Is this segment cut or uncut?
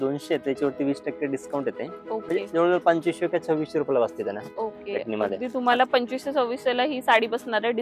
uncut